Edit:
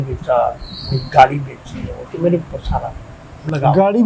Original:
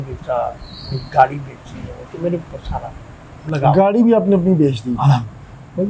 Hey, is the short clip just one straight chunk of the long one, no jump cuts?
yes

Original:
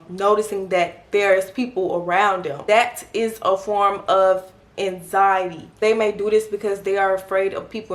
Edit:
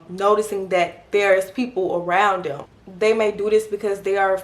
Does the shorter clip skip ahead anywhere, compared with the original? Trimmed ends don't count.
yes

